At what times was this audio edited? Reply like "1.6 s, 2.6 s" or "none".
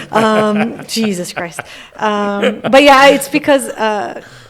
none